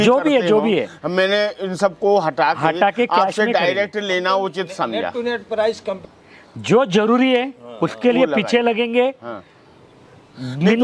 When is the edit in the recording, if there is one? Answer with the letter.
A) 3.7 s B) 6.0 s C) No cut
B